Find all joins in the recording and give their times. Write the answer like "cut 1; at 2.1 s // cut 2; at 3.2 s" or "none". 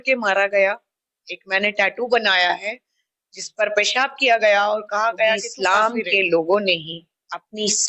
cut 1; at 5.5 s